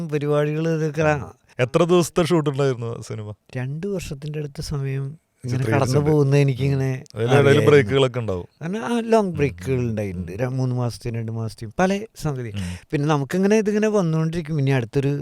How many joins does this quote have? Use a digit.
0